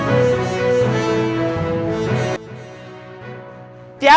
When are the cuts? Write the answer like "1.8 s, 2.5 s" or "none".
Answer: 2.3 s